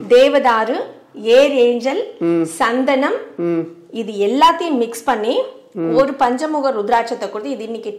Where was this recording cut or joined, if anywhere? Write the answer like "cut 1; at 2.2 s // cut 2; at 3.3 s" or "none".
none